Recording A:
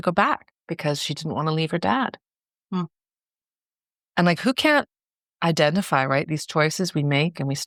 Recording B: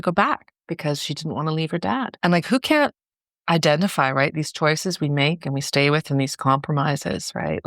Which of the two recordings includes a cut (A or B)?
B